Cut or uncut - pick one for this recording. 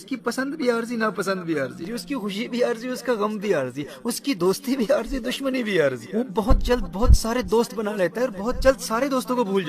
cut